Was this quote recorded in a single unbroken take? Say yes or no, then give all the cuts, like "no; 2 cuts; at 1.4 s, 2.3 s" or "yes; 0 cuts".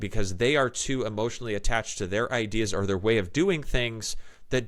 yes; 0 cuts